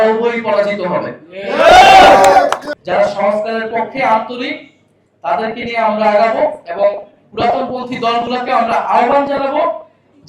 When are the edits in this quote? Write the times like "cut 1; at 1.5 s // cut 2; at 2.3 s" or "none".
cut 1; at 2.7 s